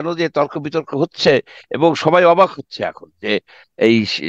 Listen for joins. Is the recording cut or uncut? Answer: uncut